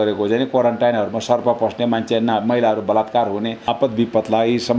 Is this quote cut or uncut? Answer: cut